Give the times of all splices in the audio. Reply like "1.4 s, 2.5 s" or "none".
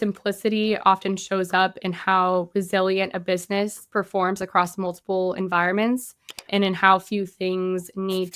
6.5 s